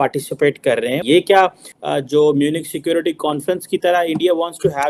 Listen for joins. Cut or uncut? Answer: uncut